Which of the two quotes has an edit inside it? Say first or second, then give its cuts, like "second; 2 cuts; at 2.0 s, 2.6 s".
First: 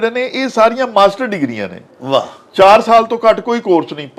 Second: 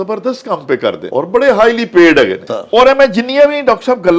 second; 2 cuts; at 1.0 s, 2.4 s